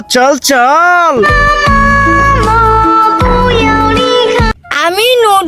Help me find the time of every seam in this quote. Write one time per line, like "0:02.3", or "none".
0:04.6